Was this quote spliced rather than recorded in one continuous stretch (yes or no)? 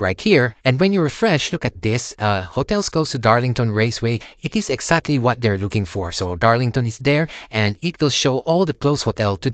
no